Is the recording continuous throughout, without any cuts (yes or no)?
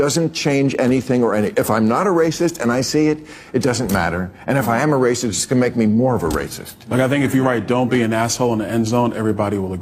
yes